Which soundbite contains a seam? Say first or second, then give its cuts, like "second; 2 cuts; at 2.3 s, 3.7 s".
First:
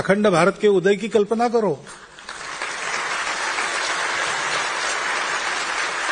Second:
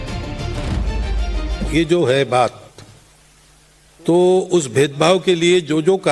first; 1 cut; at 4.4 s